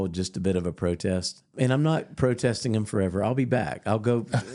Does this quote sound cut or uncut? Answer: cut